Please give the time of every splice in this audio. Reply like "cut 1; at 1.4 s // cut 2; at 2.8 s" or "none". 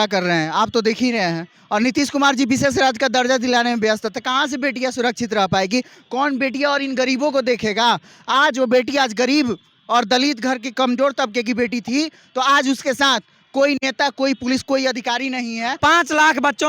cut 1; at 15.8 s